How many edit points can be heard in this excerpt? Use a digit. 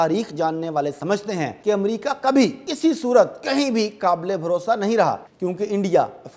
3